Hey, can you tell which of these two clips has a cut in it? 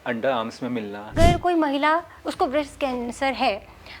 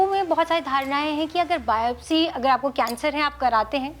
first; 1 cut; at 1.1 s

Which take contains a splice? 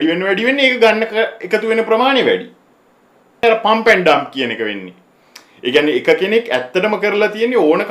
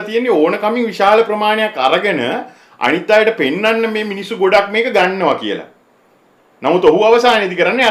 first; 1 cut; at 3.4 s

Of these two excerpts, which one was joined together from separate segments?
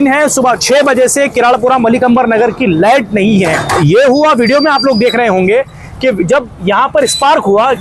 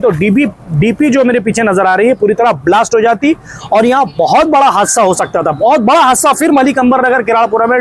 first; 1 cut; at 3.7 s

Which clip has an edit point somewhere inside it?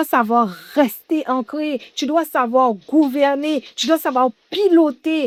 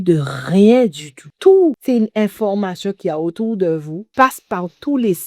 second; 3 cuts; at 1.2 s, 1.8 s, 4.0 s

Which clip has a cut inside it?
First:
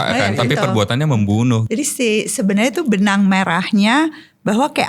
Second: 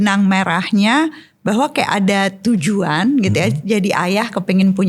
first; 1 cut; at 1.6 s

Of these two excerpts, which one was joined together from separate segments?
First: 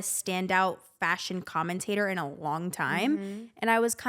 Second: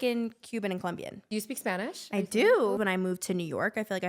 second; 2 cuts; at 1.1 s, 2.8 s

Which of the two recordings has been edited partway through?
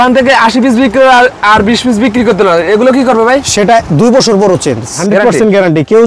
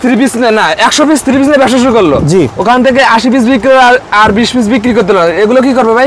first; 1 cut; at 5.0 s

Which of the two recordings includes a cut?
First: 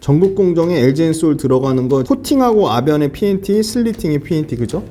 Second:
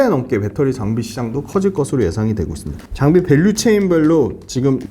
second; 1 cut; at 2.8 s

